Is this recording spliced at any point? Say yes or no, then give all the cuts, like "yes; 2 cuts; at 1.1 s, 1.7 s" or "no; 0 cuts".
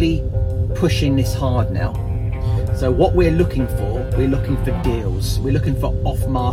no; 0 cuts